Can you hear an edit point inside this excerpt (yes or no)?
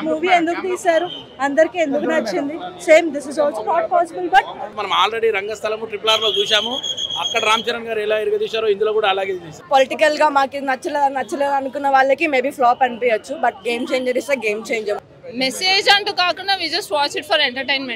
yes